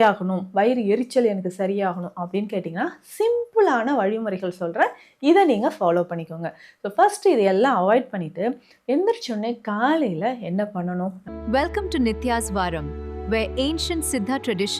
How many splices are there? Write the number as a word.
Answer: one